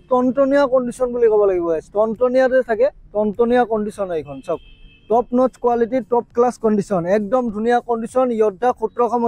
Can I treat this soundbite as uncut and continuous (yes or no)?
yes